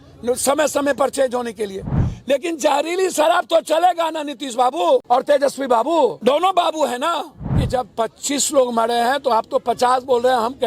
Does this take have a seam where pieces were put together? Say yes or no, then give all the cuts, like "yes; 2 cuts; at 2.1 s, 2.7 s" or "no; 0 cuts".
yes; 4 cuts; at 2.0 s, 5.0 s, 6.2 s, 7.6 s